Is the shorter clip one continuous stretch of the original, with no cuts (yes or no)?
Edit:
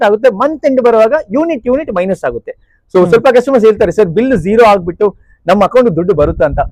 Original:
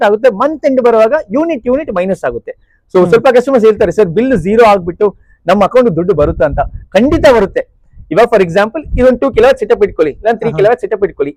yes